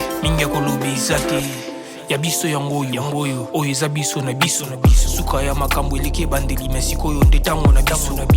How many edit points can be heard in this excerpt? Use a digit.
0